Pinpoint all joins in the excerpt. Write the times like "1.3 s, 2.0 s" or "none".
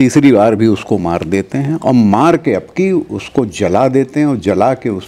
none

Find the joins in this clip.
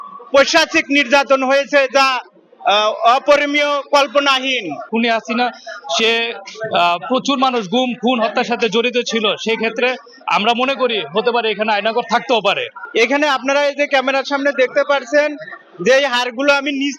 4.9 s, 12.7 s

